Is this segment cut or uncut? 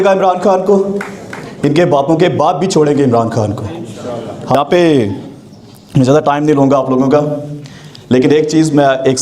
cut